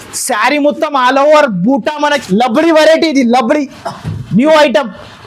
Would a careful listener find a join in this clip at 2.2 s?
yes; 1 cut; at 2.2 s

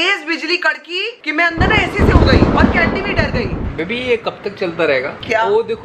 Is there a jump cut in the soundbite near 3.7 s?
yes; 1 cut; at 3.7 s

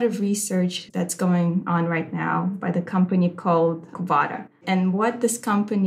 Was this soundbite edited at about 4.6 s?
yes; 1 cut; at 4.6 s

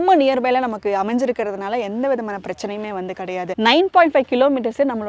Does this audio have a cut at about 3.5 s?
yes; 1 cut; at 3.5 s

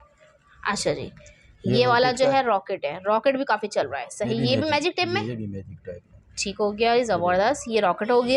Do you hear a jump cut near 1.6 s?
no; 0 cuts

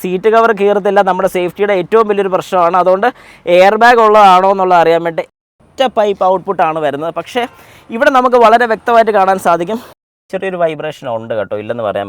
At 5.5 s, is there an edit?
yes; 2 cuts; at 5.5 s, 9.9 s

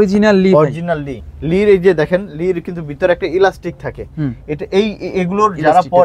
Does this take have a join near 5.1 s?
no; 1 cut; at 1.3 s

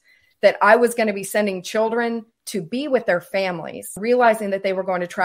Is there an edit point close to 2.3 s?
no; 1 cut; at 4.0 s

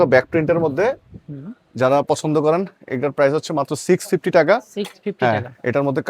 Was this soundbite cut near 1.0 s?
no; 0 cuts

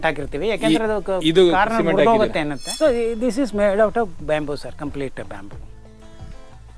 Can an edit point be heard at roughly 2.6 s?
yes; 1 cut; at 2.6 s

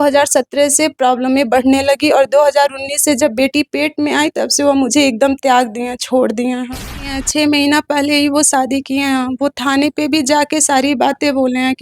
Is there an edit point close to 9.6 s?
no; 1 cut; at 7.1 s

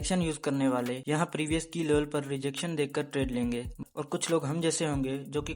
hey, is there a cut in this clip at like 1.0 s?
yes; 2 cuts; at 1.0 s, 3.8 s

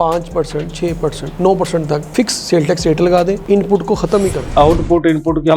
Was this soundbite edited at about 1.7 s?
no; 1 cut; at 4.4 s

